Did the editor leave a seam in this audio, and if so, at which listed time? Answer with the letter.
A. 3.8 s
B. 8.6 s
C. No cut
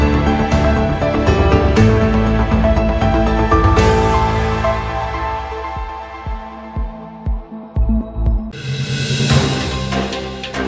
B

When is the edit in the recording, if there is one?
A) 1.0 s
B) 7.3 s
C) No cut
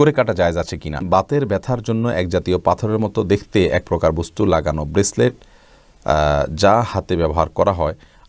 A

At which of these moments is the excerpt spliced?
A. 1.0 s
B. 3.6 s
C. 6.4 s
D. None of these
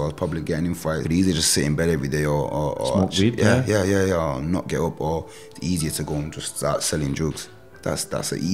A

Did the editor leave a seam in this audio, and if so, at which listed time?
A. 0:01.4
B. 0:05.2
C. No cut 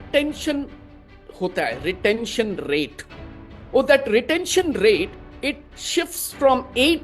B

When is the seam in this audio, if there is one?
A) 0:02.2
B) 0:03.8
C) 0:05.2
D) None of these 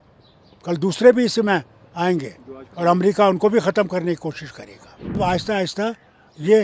C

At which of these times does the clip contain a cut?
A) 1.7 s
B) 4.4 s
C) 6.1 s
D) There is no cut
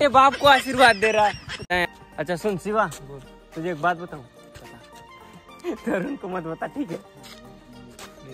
A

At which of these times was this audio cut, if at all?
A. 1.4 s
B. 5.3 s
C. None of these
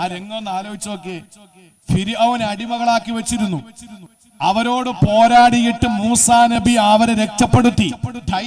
C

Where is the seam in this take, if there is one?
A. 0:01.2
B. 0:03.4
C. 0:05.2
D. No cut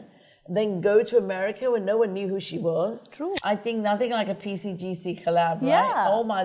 B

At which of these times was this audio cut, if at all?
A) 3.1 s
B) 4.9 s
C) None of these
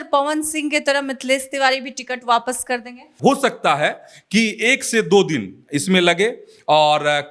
A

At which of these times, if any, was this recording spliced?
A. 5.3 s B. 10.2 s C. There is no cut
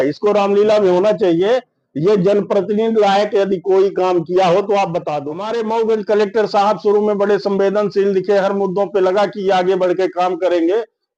A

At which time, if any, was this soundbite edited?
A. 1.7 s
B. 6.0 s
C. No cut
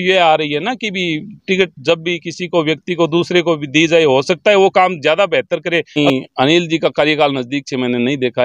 B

